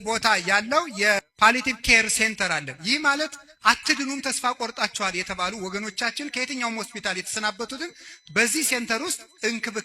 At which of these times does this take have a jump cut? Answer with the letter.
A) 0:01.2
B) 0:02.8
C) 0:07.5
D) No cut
A